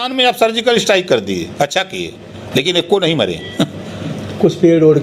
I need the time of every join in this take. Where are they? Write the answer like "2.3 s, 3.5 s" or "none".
none